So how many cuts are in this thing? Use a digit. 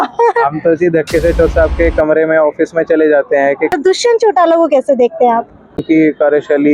2